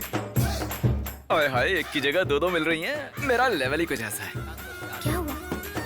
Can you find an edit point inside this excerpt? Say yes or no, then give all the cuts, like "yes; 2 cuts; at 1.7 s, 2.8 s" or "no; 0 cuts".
no; 0 cuts